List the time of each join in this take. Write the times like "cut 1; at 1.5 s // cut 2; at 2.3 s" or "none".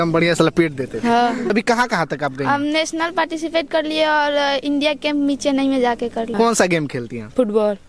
cut 1; at 1.5 s // cut 2; at 6.3 s